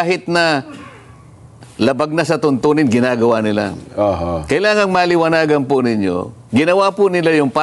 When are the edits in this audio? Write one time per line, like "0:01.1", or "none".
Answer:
none

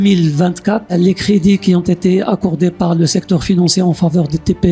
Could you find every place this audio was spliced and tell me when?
0:00.9

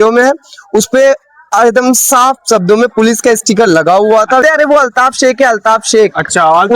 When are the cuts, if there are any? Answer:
0:04.4

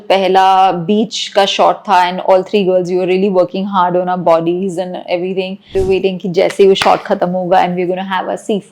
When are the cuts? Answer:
0:05.7

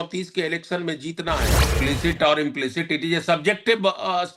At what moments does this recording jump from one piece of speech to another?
0:01.6

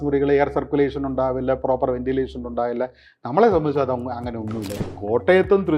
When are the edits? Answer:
0:04.7

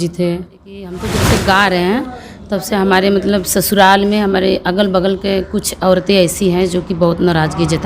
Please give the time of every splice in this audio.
0:01.1

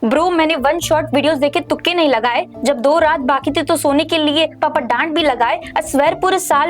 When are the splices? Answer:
none

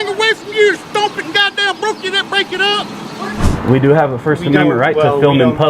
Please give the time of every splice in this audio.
0:03.0

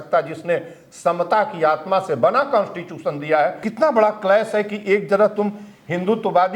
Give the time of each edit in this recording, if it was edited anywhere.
0:03.7

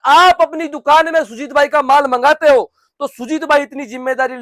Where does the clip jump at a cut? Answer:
none

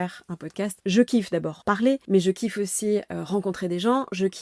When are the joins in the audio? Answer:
0:00.8
0:01.7

